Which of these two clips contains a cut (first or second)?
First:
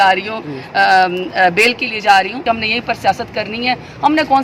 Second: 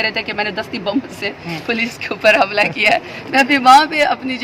first